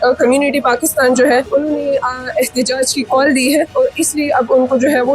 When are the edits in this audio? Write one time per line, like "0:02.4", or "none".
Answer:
0:01.5
0:03.7